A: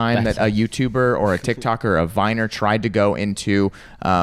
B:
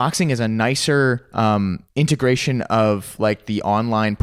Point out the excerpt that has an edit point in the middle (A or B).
B